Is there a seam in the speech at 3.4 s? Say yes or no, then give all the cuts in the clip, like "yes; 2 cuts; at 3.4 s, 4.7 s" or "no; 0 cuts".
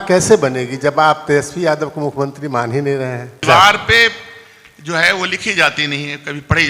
yes; 1 cut; at 3.4 s